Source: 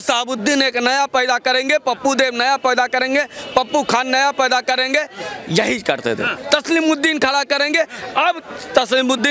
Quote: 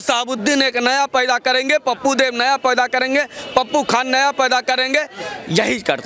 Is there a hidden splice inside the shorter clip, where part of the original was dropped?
no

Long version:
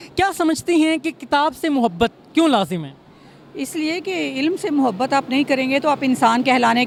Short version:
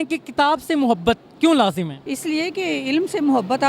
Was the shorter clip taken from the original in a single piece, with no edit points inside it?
no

